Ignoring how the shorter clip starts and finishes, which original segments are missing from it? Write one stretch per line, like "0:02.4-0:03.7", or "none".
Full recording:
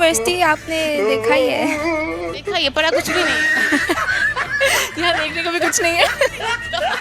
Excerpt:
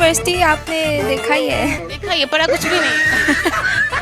0:01.8-0:02.2

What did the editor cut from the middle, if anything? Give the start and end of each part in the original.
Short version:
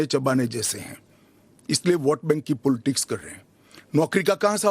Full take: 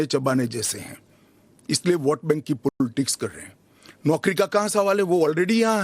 0:02.7-0:02.8

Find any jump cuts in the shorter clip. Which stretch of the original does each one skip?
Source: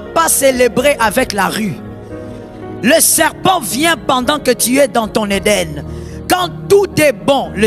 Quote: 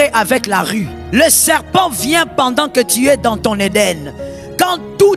0:01.8-0:02.7

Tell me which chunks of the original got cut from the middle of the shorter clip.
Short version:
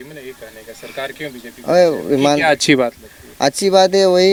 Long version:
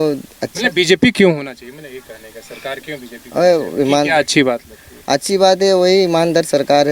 none

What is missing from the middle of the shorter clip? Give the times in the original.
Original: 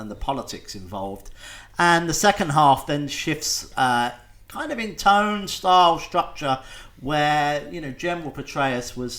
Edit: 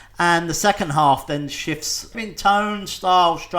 0:03.6-0:04.6

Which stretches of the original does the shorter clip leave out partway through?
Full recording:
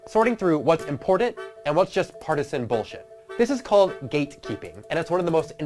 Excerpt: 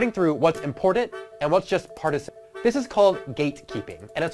0:02.5-0:03.0

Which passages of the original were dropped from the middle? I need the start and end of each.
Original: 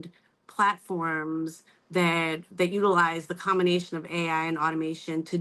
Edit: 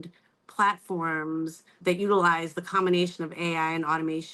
0:01.7-0:02.4

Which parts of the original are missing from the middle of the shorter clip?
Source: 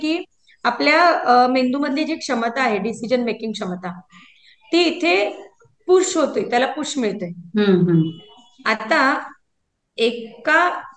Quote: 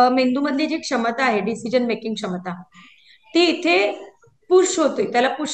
none

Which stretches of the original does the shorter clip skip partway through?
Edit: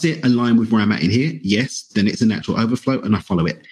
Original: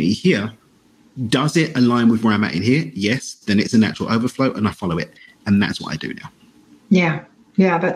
none

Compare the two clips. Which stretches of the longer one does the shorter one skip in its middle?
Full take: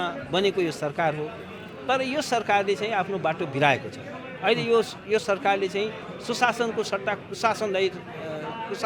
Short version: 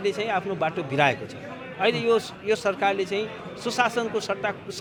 none

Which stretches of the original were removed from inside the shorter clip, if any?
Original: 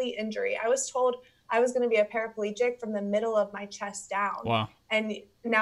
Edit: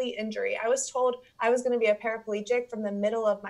0:01.3-0:01.4

